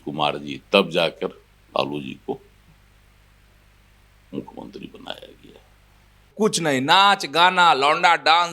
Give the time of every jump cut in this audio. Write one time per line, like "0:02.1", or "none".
0:06.3